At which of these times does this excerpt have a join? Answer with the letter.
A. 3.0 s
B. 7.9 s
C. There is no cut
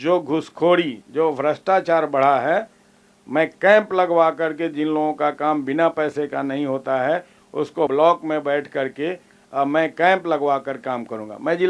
B